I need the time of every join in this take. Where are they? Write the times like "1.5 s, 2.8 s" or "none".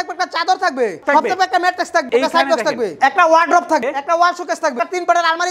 1.0 s, 2.1 s, 3.0 s, 3.8 s, 4.7 s

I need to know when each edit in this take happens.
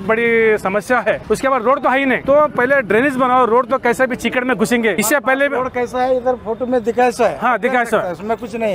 1.2 s, 2.2 s, 5.0 s

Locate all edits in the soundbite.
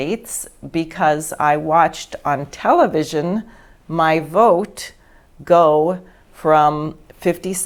none

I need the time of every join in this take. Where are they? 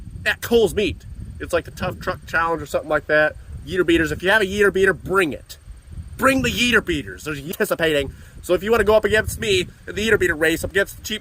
7.5 s

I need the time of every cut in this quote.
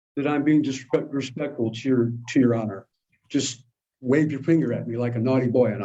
none

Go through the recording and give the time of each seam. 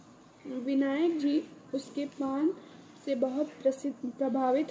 2.4 s

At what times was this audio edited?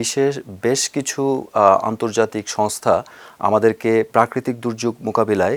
none

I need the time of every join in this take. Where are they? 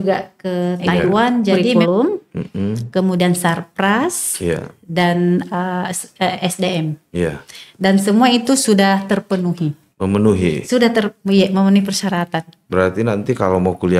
1.7 s

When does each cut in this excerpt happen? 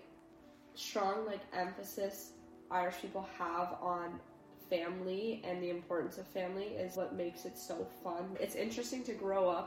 6.9 s, 8.3 s

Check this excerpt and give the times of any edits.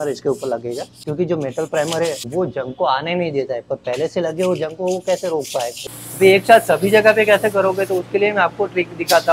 0.9 s, 2.2 s, 5.8 s

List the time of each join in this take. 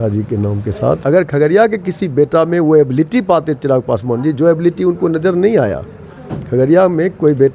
1.0 s

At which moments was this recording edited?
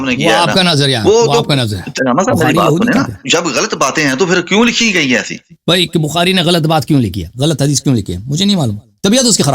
1.9 s, 3.2 s, 5.6 s, 7.3 s

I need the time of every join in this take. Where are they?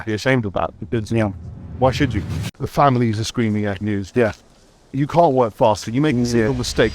2.5 s

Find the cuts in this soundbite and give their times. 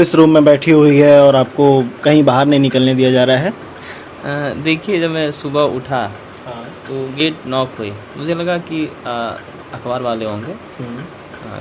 none

